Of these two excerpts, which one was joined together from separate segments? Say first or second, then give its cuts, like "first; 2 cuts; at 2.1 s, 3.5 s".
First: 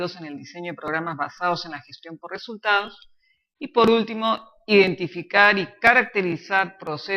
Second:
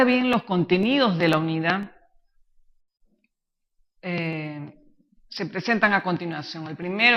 first; 1 cut; at 4.8 s